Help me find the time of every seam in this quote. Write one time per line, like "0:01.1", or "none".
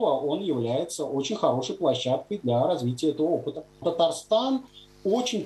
0:03.8